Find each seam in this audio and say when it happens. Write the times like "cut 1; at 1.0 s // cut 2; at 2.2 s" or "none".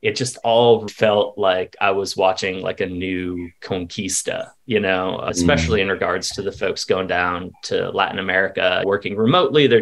cut 1; at 0.9 s // cut 2; at 5.2 s // cut 3; at 8.9 s